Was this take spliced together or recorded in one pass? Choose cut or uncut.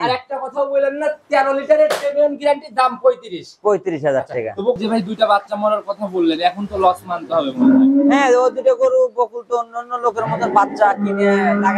cut